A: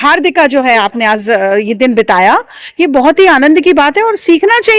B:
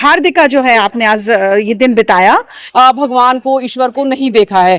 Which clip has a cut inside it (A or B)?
B